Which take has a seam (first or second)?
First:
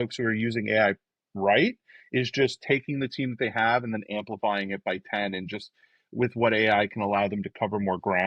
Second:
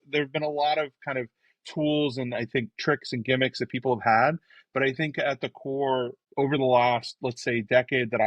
second